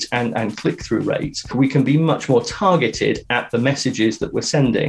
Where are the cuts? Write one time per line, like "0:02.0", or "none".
0:01.5